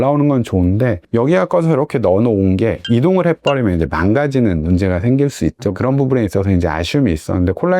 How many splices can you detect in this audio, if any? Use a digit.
2